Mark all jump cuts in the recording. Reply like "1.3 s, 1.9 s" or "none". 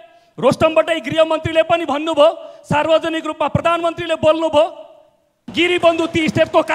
5.4 s